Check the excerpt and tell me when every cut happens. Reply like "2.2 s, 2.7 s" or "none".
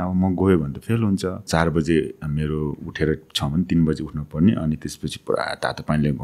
1.5 s